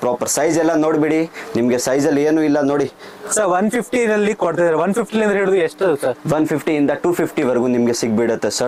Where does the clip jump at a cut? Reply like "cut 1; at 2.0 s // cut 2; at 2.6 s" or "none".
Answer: none